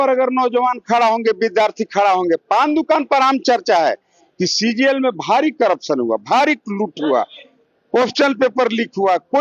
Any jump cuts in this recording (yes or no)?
no